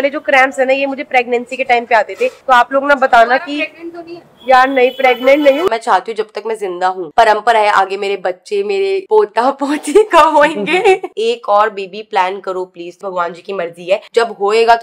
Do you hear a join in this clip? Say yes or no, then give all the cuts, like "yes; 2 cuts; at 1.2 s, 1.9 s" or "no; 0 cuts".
yes; 4 cuts; at 5.7 s, 7.1 s, 11.1 s, 12.9 s